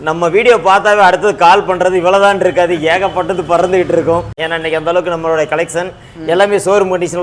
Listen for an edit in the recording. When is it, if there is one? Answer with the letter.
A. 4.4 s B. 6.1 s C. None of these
A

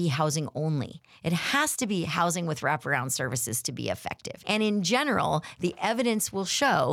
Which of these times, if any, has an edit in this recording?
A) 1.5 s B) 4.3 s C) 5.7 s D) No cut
B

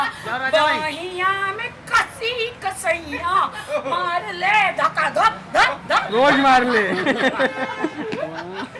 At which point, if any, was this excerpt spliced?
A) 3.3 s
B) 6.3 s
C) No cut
C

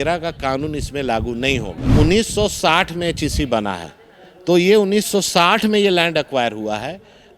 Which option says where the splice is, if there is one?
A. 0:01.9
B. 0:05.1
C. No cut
A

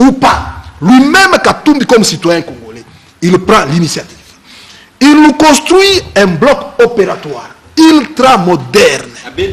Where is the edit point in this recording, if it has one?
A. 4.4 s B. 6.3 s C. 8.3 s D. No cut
B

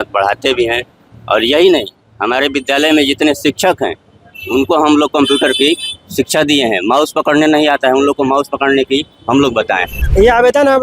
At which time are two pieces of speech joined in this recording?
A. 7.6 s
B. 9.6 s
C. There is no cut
B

